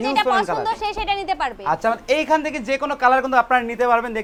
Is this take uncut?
yes; 0 cuts

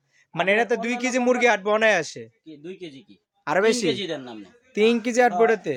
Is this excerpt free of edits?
yes; 0 cuts

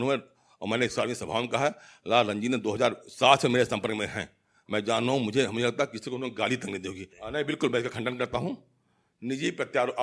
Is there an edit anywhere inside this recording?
yes; 1 cut; at 7.1 s

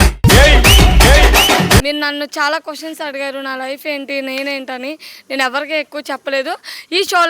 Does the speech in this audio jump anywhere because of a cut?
yes; 1 cut; at 1.8 s

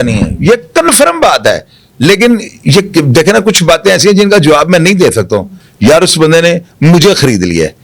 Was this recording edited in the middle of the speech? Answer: yes; 1 cut; at 5.6 s

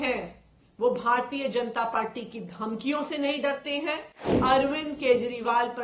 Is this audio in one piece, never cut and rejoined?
no; 1 cut; at 4.3 s

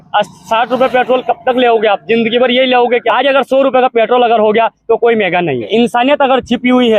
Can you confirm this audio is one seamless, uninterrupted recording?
no; 2 cuts; at 3.1 s, 5.7 s

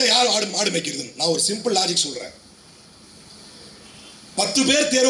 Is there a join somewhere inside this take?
no; 0 cuts

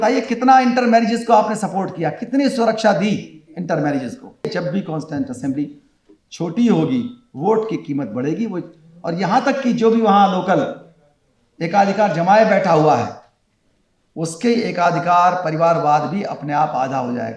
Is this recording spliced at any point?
yes; 1 cut; at 4.4 s

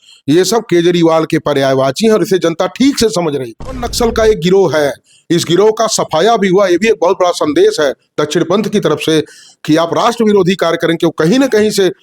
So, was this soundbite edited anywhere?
yes; 1 cut; at 3.9 s

